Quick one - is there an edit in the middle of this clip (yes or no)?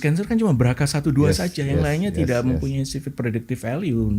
no